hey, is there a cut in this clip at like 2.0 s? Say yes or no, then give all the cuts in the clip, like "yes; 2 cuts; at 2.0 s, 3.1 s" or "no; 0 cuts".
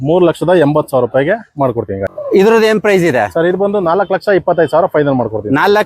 yes; 1 cut; at 2.0 s